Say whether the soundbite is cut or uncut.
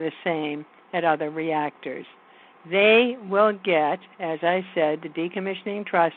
uncut